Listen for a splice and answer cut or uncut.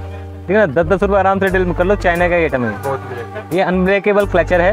uncut